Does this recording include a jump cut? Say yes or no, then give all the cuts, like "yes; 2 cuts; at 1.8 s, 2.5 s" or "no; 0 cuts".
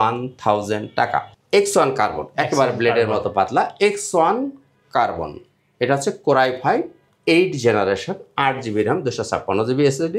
yes; 1 cut; at 1.3 s